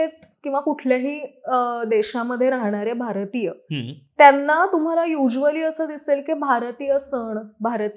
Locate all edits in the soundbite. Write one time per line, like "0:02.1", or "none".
none